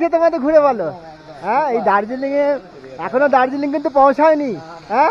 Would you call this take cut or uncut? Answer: uncut